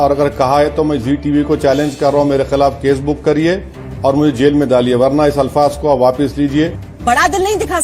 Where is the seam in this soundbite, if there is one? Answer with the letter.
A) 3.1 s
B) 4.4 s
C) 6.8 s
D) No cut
C